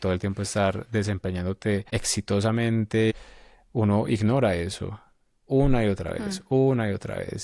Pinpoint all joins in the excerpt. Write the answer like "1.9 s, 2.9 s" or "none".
1.9 s, 3.1 s